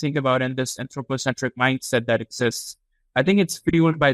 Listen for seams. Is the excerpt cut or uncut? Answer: uncut